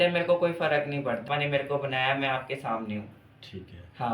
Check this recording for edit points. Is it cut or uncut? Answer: cut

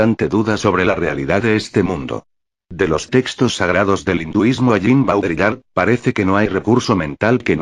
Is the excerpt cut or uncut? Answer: uncut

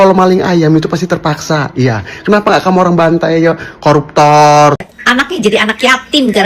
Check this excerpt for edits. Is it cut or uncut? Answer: cut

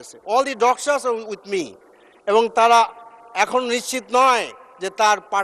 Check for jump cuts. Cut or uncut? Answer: uncut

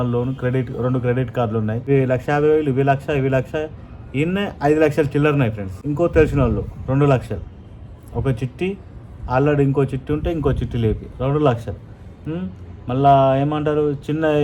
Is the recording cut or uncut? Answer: cut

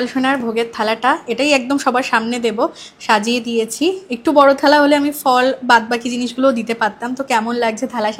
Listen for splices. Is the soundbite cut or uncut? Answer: uncut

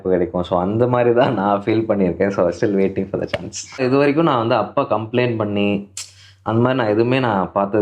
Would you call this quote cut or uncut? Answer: cut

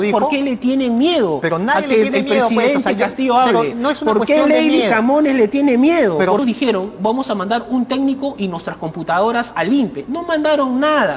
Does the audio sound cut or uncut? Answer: cut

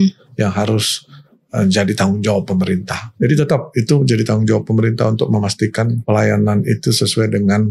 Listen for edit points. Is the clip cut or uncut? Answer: cut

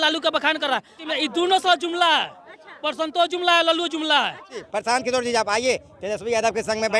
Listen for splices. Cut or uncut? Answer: cut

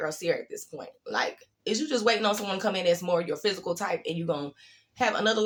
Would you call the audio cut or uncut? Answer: uncut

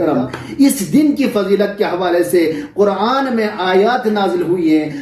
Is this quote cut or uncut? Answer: uncut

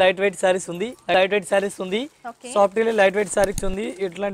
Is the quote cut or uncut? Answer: cut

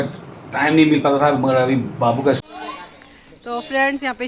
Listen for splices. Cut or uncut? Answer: cut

